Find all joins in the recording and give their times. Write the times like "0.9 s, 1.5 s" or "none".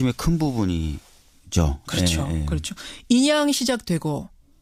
none